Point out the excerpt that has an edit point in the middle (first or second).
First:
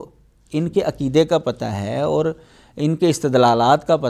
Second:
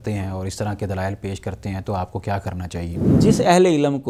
second